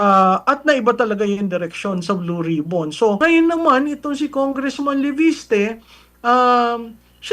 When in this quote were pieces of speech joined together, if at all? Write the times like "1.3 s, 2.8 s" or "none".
3.2 s